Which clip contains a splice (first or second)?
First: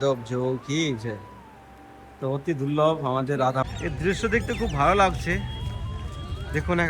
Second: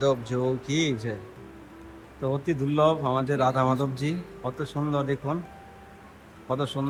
first